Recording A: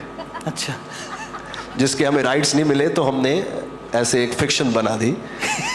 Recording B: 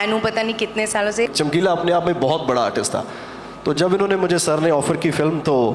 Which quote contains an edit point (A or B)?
B